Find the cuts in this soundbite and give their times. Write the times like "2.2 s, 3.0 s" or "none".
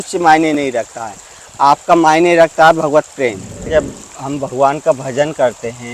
3.6 s